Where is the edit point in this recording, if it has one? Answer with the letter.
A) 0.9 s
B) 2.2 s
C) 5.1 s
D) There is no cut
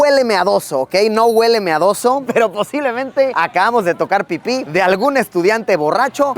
B